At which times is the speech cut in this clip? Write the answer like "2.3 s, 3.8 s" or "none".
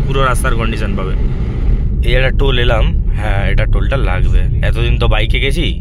1.7 s